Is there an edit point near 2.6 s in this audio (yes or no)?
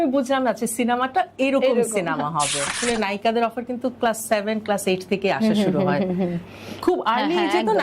yes